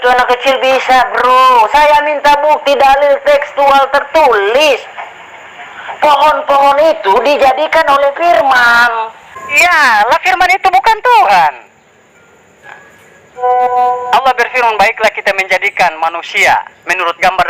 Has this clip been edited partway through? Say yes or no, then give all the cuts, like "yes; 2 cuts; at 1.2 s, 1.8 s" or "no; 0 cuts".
yes; 1 cut; at 9.4 s